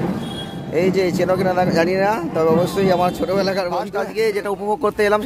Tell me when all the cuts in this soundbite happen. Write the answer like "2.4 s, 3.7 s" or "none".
3.9 s